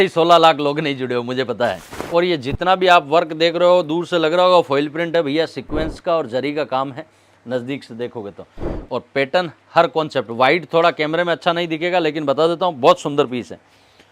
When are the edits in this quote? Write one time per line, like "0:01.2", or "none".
0:01.9

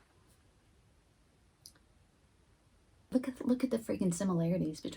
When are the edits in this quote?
0:03.1

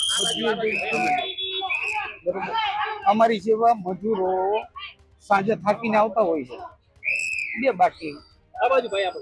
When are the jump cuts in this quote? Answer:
none

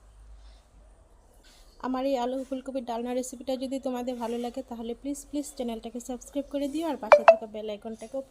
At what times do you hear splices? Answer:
0:01.4

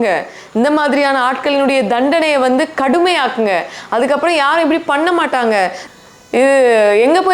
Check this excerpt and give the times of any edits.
0:05.8

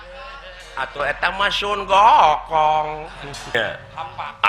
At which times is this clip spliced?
0:03.5

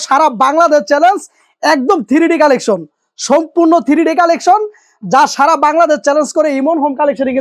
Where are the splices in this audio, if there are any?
none

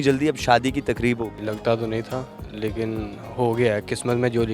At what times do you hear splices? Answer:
0:01.4

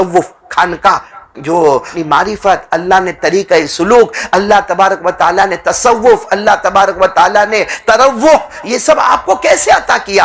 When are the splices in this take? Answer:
0:01.9

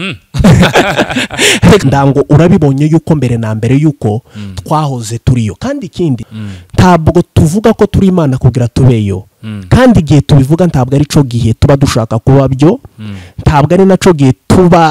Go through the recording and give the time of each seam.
0:01.8
0:06.3

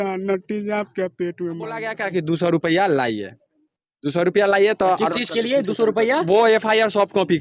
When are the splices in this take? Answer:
0:01.9

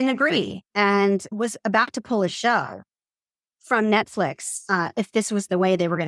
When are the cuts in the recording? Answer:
0:01.3

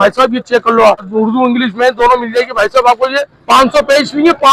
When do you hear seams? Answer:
0:01.1
0:03.3

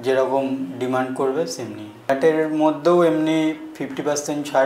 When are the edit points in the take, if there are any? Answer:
0:02.1

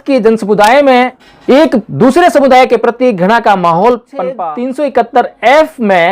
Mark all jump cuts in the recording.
0:01.3
0:04.4

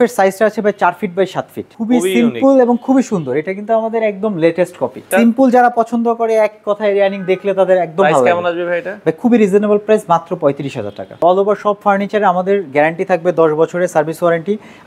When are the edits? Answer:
0:01.7
0:05.1
0:11.2

